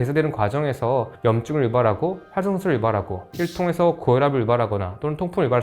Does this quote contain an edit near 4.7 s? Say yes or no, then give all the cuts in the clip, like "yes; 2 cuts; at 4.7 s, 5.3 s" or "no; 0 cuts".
no; 1 cut; at 3.2 s